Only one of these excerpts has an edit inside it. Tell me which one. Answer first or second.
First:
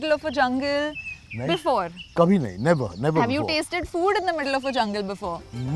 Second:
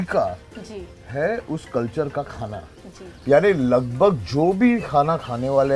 second